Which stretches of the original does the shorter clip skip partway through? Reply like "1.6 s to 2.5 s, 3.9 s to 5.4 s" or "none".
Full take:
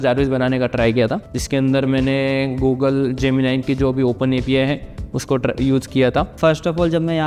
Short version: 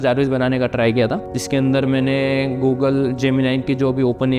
none